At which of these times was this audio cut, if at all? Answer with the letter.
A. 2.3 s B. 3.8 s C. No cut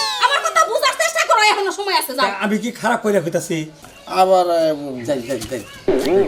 B